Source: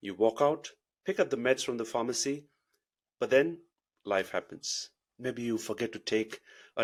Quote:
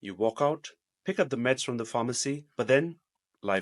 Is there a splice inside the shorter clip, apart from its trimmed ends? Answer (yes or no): yes